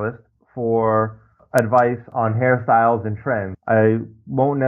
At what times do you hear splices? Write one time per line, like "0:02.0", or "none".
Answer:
0:01.4
0:02.1
0:03.5